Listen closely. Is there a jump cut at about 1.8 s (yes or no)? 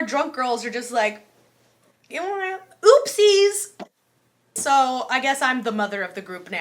no